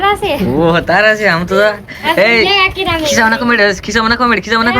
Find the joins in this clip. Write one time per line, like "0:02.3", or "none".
none